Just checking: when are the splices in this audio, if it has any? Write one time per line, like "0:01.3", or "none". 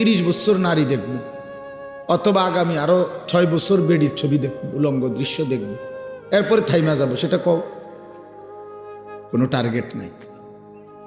0:10.1